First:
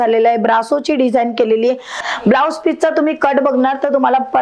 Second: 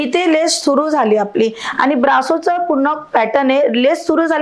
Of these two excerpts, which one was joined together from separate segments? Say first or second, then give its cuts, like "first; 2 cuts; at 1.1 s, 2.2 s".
first; 1 cut; at 2.0 s